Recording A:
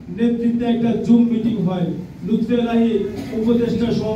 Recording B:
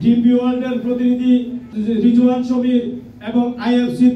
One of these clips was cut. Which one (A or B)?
B